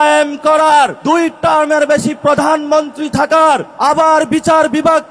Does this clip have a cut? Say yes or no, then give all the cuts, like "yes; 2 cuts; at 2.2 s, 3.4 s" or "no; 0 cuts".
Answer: yes; 2 cuts; at 1.0 s, 3.7 s